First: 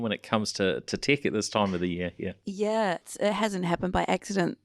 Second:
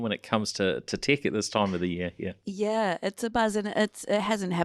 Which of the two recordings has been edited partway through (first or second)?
first